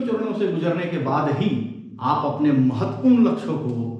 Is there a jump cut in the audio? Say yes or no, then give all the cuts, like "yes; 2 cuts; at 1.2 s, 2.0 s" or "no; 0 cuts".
no; 0 cuts